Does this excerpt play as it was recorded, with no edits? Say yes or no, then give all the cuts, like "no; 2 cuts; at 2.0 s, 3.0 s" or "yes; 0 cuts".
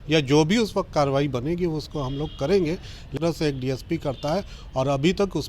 no; 1 cut; at 3.1 s